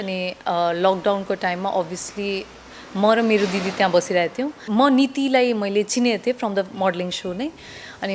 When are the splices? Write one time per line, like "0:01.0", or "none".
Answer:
0:04.6